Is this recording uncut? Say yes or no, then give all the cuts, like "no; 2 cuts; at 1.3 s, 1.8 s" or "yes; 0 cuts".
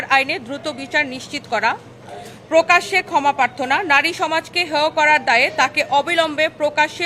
yes; 0 cuts